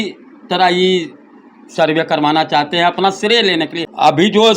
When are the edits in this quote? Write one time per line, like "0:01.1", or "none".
0:03.4